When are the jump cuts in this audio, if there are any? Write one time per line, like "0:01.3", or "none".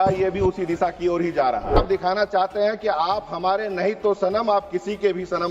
0:01.8